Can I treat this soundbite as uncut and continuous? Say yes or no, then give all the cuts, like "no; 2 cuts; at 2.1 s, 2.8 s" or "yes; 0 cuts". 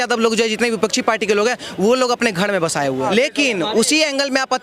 no; 1 cut; at 3.1 s